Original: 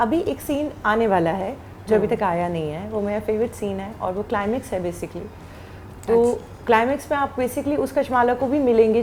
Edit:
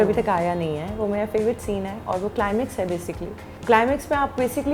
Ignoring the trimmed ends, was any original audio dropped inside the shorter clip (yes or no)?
yes